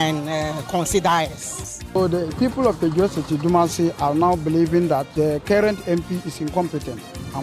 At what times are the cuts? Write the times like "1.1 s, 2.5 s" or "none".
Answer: 1.7 s, 5.1 s